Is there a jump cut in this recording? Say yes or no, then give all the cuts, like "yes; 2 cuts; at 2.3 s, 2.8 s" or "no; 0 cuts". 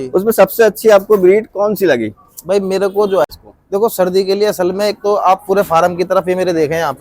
yes; 1 cut; at 3.2 s